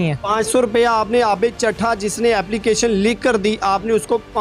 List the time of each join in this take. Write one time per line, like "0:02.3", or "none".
none